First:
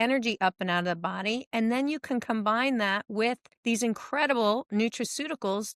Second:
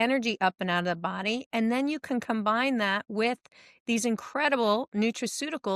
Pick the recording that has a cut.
first; 1 cut; at 3.5 s

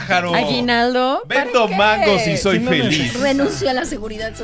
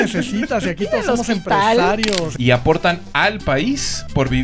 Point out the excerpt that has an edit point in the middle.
second; 1 cut; at 2.3 s

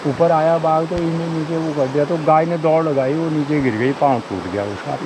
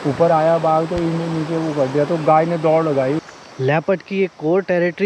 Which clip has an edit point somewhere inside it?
second; 1 cut; at 3.2 s

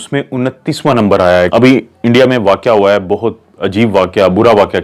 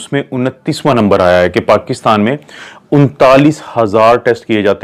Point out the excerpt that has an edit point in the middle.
first; 1 cut; at 1.5 s

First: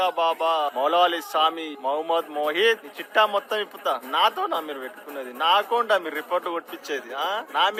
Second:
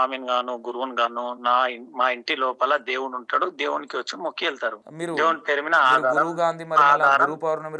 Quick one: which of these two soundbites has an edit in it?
second; 1 cut; at 4.8 s

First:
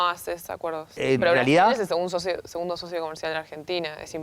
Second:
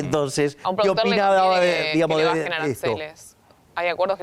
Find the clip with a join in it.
first; 1 cut; at 1.0 s

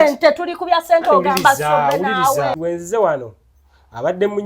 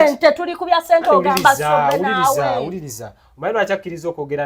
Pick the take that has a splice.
first; 1 cut; at 2.5 s

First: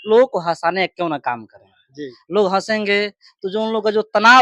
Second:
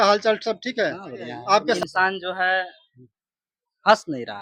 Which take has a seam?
second; 1 cut; at 1.8 s

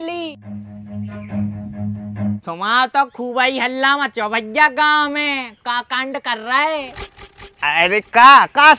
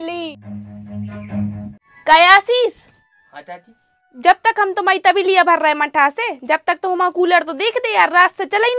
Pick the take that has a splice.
second; 1 cut; at 1.7 s

